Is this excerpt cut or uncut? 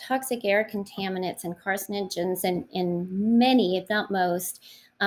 uncut